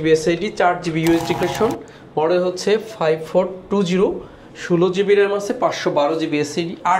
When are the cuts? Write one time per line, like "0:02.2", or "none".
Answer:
0:01.4